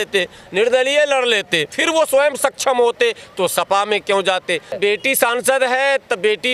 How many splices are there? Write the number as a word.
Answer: two